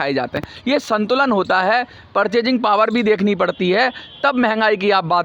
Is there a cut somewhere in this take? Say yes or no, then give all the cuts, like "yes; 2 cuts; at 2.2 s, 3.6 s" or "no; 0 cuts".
no; 0 cuts